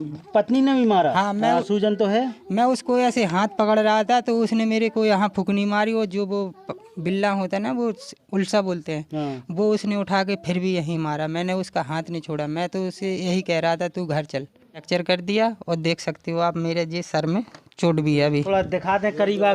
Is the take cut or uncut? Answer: cut